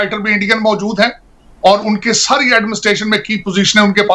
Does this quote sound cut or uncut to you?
uncut